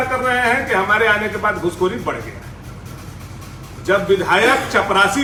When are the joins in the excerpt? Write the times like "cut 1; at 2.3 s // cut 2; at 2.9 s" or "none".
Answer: none